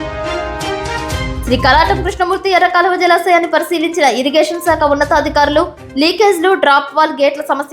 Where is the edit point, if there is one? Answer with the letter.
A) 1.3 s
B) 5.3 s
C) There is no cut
A